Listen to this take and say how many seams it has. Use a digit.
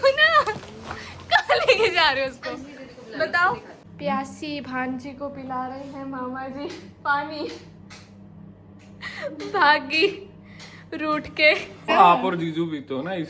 2